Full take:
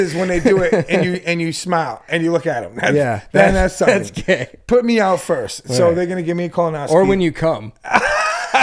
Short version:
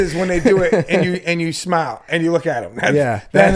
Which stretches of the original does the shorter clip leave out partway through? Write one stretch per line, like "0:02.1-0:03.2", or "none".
none